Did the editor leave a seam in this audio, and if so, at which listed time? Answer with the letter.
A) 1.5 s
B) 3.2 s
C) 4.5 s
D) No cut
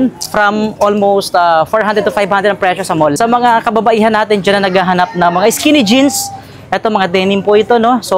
B